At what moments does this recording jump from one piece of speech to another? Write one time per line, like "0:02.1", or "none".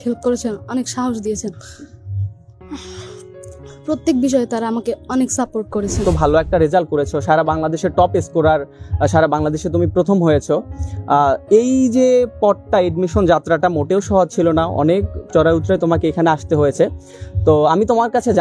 0:06.0